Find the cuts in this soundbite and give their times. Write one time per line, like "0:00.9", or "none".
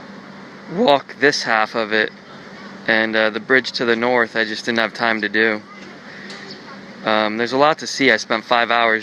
none